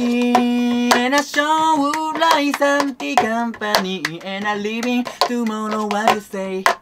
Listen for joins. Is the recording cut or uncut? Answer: uncut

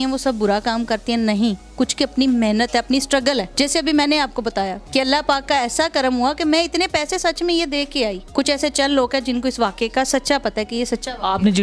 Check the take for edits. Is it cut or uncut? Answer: uncut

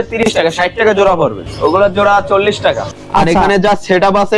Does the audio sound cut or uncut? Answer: cut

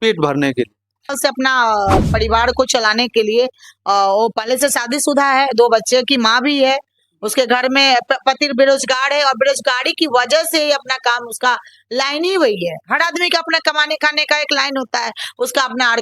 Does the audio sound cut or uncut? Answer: cut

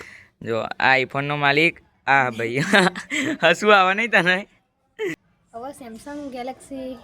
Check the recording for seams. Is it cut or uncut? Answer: cut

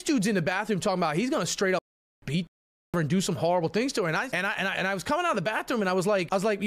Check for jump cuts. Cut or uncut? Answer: uncut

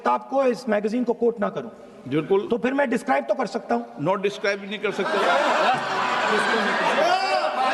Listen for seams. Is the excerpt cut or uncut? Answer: uncut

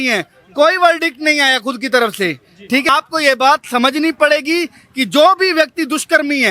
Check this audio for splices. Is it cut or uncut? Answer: cut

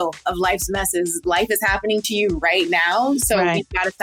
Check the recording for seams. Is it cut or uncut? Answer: uncut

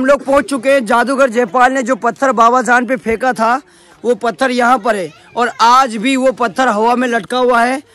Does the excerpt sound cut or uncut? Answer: uncut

